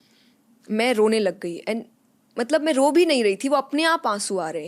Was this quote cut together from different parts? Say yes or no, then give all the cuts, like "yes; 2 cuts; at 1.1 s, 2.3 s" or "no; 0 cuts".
no; 0 cuts